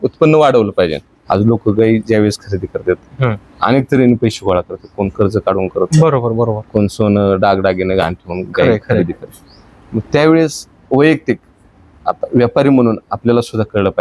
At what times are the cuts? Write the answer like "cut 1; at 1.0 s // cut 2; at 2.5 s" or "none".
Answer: cut 1; at 1.1 s

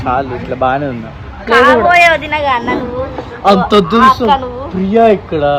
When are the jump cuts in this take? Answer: none

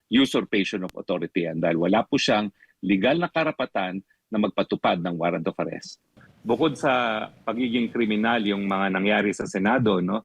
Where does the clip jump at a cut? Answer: cut 1; at 6.3 s

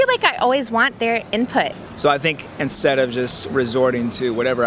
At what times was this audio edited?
cut 1; at 1.8 s

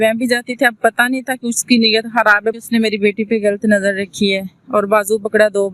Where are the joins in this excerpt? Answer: cut 1; at 2.5 s

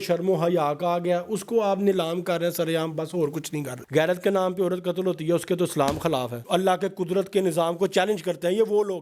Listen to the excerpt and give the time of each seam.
cut 1; at 3.8 s // cut 2; at 6.4 s

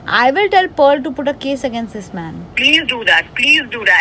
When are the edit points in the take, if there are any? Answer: none

